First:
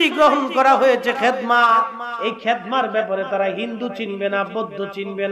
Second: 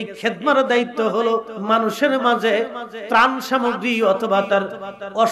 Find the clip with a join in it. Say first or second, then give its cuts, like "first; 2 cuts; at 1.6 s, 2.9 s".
second; 1 cut; at 1.5 s